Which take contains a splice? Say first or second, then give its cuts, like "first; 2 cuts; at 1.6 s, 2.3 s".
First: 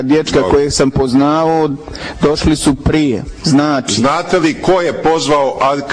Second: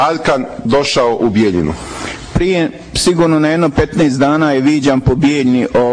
first; 1 cut; at 3.7 s